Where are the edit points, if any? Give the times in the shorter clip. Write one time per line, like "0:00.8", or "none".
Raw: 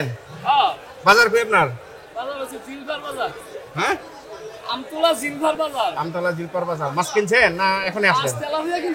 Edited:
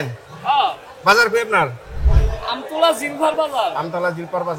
0:02.0